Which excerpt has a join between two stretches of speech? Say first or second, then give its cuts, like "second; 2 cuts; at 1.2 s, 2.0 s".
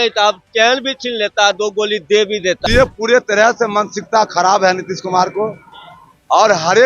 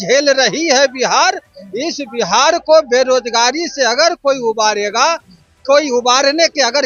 first; 1 cut; at 2.6 s